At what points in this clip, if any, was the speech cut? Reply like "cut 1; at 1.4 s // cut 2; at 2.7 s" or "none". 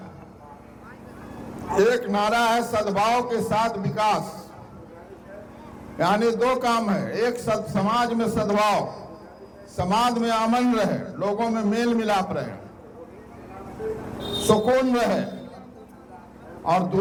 none